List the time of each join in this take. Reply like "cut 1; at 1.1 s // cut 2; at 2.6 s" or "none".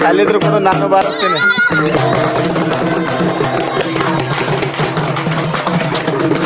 none